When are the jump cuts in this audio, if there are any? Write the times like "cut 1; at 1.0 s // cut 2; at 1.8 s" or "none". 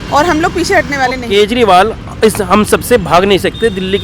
cut 1; at 1.2 s